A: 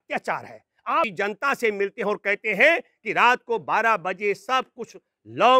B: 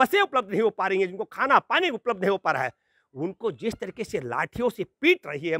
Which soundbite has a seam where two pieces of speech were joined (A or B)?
A